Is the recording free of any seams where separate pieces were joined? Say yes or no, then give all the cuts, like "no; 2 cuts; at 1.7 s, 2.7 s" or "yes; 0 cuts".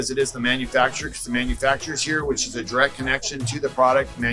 yes; 0 cuts